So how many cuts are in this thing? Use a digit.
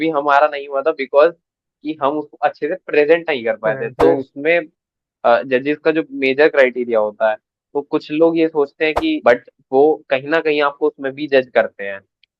2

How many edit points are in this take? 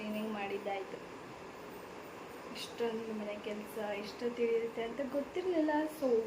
1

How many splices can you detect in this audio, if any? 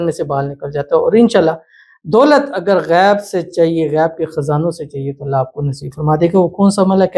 0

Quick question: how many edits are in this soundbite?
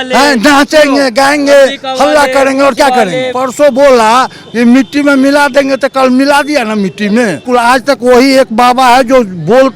2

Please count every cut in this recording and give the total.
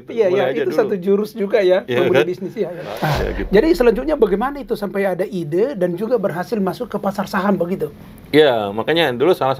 1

